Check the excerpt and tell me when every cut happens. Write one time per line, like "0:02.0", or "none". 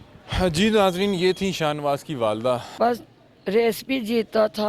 0:02.7